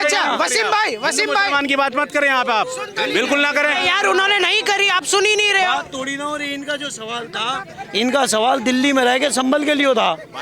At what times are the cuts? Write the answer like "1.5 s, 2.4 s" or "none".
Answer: none